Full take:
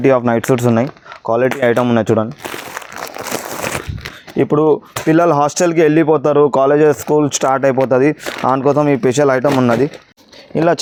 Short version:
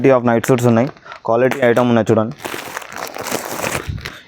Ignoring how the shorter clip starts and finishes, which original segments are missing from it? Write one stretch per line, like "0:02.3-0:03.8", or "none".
none